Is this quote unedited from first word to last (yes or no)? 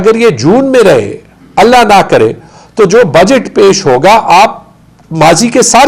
yes